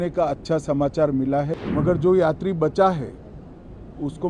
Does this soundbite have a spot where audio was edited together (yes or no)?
yes